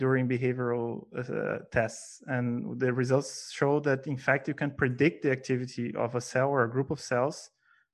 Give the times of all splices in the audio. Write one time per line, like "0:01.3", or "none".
none